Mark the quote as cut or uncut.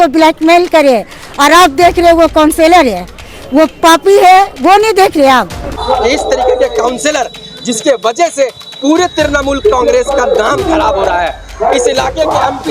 cut